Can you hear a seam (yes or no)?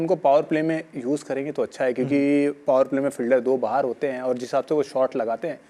no